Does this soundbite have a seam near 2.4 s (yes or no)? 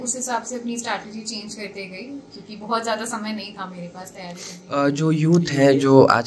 no